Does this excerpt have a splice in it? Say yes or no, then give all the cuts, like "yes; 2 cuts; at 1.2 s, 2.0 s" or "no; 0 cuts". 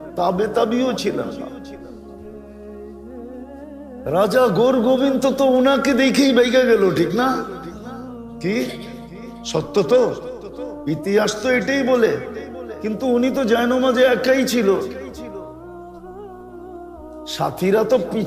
yes; 2 cuts; at 15.1 s, 16.8 s